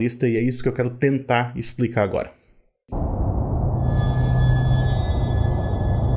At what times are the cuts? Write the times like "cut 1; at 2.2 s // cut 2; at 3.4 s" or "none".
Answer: cut 1; at 2.5 s